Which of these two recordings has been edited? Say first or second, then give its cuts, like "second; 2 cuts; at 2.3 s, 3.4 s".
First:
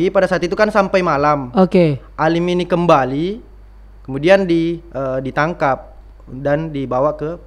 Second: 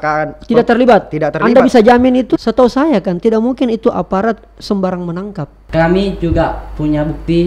second; 2 cuts; at 2.4 s, 5.6 s